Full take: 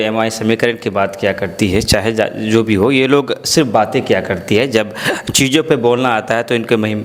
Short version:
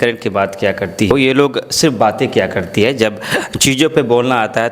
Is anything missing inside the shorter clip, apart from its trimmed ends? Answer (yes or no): yes